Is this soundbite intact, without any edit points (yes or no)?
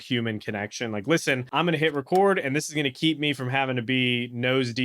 no